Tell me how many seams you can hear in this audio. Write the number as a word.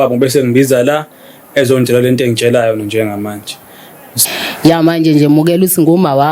one